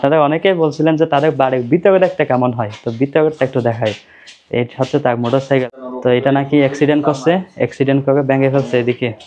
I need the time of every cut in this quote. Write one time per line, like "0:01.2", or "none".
none